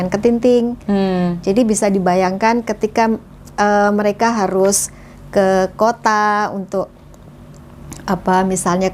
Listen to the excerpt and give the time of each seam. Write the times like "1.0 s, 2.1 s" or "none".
none